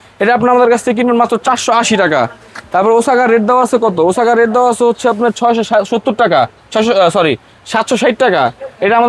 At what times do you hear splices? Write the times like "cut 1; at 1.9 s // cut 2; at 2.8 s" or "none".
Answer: none